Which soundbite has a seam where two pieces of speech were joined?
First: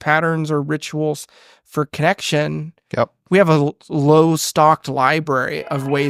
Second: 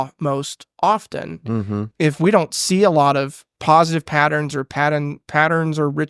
second; 2 cuts; at 1.8 s, 3.6 s

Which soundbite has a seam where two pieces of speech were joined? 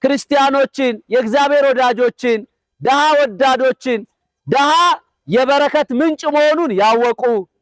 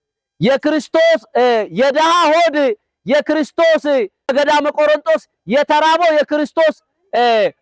second; 1 cut; at 4.3 s

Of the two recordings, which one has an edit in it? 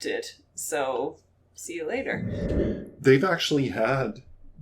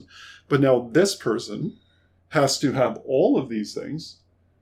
first; 1 cut; at 2.5 s

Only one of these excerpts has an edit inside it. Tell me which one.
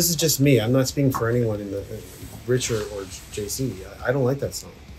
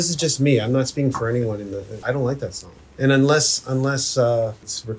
second; 1 cut; at 1.9 s

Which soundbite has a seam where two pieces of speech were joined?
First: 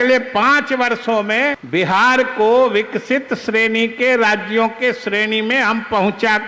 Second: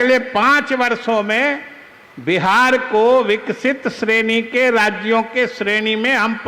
first; 1 cut; at 1.6 s

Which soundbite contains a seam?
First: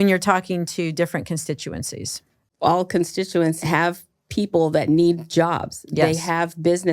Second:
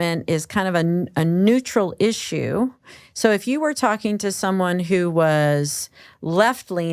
first; 2 cuts; at 2.5 s, 3.6 s

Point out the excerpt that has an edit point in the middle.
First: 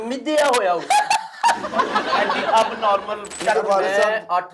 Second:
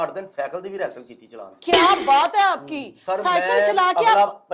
first; 1 cut; at 3.3 s

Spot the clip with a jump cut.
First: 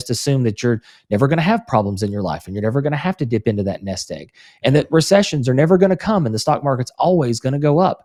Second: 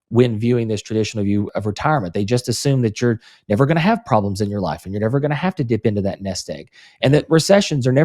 second; 1 cut; at 1.5 s

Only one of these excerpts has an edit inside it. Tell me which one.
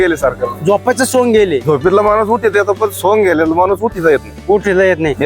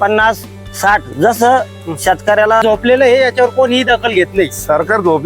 second; 1 cut; at 2.6 s

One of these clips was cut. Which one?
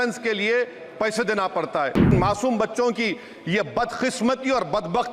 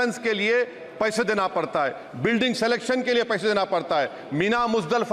first; 1 cut; at 2.1 s

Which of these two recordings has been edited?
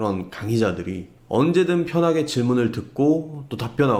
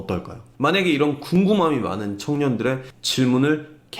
second; 1 cut; at 3.0 s

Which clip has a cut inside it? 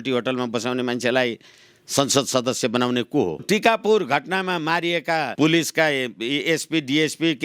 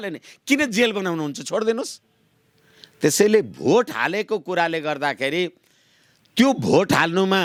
first; 2 cuts; at 3.4 s, 5.3 s

